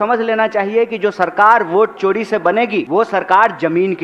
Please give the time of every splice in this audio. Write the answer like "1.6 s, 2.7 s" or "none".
2.9 s

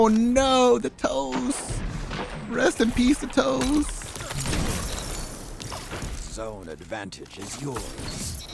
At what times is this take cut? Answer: none

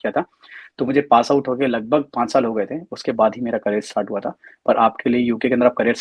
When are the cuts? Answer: none

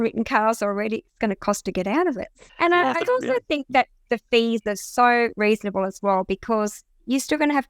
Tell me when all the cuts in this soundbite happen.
2.4 s

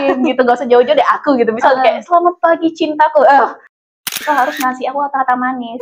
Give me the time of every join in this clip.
3.8 s

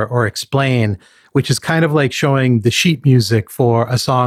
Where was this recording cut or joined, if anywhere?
none

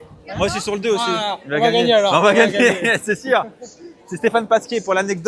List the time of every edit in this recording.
none

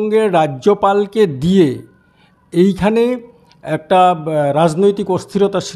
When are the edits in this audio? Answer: none

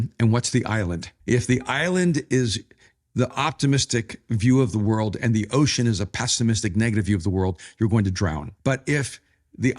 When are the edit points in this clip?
1.1 s, 8.5 s

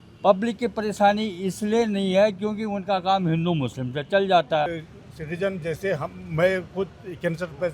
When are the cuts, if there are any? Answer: 4.8 s

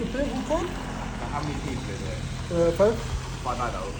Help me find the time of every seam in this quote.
none

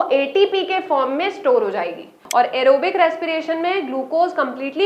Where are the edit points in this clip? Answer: 2.2 s

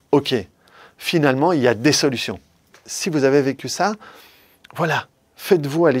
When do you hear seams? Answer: 2.8 s

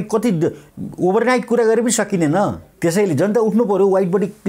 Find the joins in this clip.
2.7 s

